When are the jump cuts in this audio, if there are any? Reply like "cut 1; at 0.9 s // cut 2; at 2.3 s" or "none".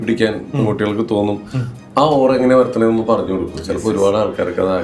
none

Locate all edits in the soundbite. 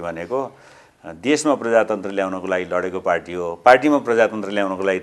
none

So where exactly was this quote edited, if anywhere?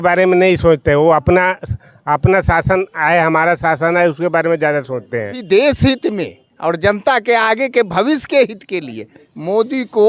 cut 1; at 5.4 s

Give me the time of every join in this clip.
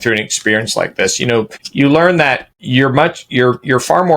cut 1; at 1.6 s // cut 2; at 2.5 s

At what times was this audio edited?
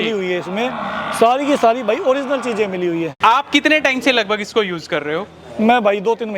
cut 1; at 3.1 s

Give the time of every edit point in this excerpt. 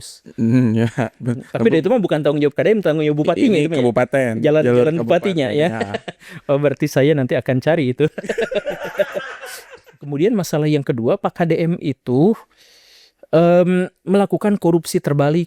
cut 1; at 10.1 s

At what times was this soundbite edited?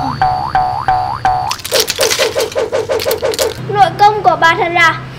cut 1; at 1.5 s // cut 2; at 3.5 s

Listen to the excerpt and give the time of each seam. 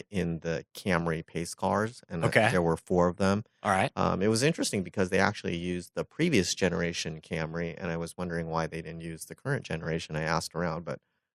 none

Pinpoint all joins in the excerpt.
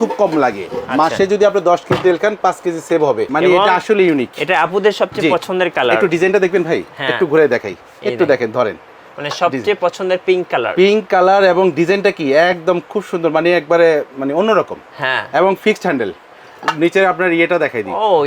cut 1; at 3.3 s

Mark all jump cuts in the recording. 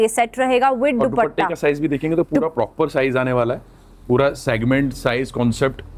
none

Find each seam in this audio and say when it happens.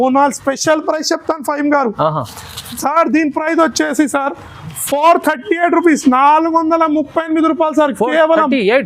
none

